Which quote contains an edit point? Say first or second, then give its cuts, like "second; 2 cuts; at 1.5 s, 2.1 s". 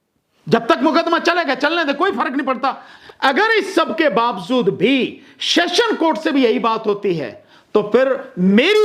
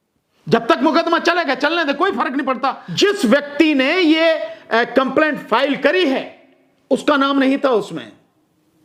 first; 1 cut; at 2.9 s